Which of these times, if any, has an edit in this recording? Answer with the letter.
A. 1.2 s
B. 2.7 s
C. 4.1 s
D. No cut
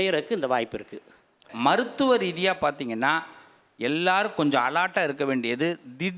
D